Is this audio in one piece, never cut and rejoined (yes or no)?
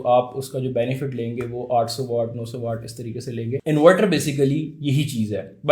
no